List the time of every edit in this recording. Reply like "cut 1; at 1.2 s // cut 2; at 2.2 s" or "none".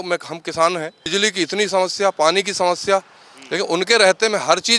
cut 1; at 1.0 s